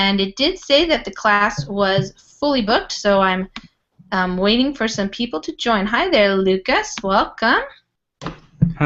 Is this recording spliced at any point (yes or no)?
no